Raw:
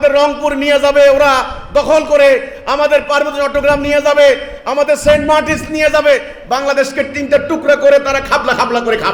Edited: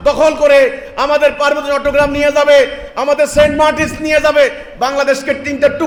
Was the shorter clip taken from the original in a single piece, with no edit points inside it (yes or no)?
yes